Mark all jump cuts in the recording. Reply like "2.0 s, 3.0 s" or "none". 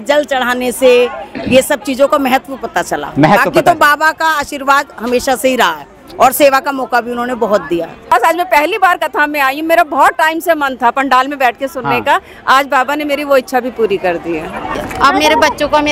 8.1 s, 14.8 s